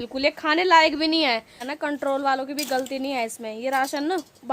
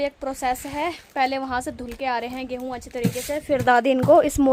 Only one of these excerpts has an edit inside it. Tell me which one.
first; 1 cut; at 1.7 s

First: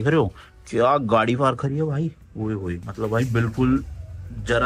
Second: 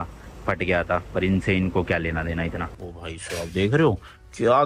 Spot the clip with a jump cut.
second; 1 cut; at 2.6 s

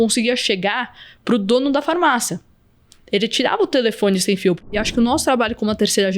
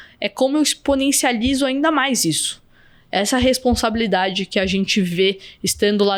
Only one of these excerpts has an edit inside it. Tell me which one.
first; 1 cut; at 4.7 s

